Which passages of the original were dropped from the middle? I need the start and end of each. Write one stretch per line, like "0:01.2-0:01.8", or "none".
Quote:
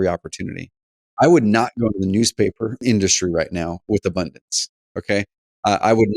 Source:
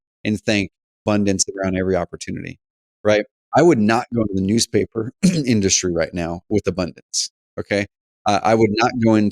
0:02.9-0:03.4
0:05.2-0:05.4